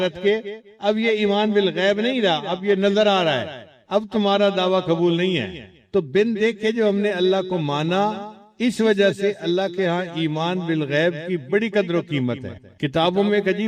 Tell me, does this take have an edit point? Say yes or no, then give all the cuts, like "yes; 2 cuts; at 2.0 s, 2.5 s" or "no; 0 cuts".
no; 0 cuts